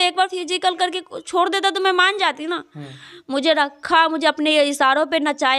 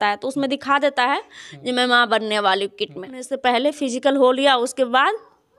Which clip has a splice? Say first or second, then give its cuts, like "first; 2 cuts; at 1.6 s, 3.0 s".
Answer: second; 1 cut; at 3.3 s